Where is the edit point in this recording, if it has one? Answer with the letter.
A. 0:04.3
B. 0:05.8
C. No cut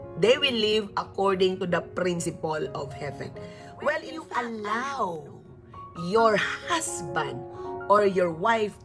A